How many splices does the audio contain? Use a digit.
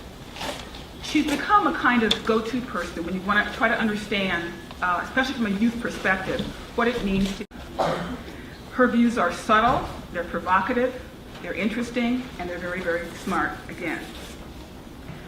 1